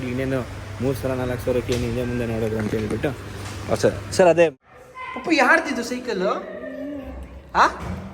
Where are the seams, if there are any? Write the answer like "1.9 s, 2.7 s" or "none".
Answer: 4.5 s